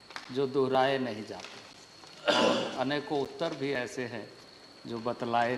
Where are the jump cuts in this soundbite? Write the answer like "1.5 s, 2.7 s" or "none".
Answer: none